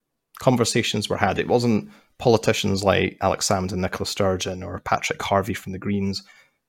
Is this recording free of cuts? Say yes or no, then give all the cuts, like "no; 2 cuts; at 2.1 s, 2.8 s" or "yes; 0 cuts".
yes; 0 cuts